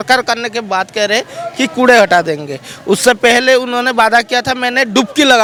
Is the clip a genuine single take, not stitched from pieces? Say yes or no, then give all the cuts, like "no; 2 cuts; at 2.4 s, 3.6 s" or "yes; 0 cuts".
yes; 0 cuts